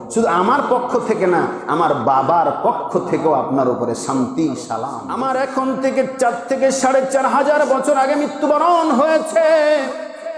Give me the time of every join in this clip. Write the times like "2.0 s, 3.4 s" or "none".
5.0 s

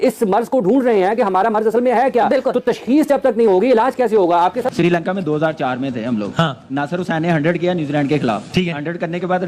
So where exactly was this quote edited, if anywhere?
4.7 s

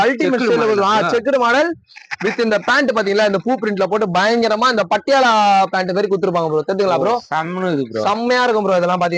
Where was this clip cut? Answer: none

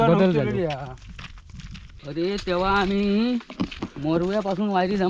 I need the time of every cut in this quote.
2.0 s

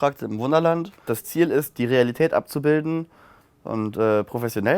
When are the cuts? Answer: 1.0 s

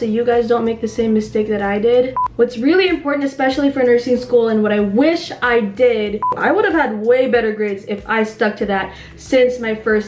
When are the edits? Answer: 2.2 s, 6.3 s

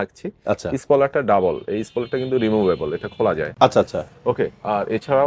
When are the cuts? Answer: none

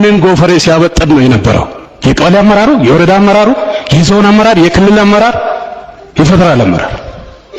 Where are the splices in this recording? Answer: none

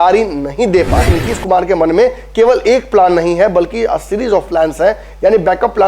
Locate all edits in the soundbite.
1.1 s

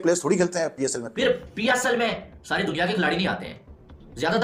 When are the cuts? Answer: 1.0 s

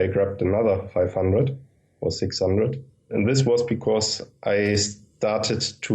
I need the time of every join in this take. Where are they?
3.1 s

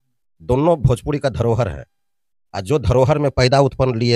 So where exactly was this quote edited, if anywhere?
none

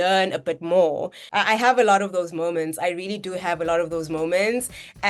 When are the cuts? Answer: 1.2 s

